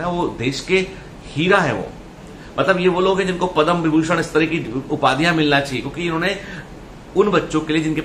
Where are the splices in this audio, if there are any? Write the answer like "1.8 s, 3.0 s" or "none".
none